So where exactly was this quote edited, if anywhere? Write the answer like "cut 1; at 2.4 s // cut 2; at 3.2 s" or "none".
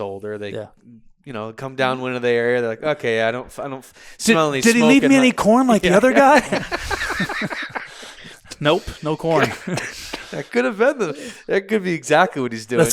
none